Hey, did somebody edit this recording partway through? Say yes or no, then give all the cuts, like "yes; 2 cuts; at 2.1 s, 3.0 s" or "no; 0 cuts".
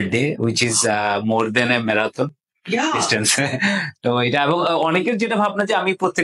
no; 0 cuts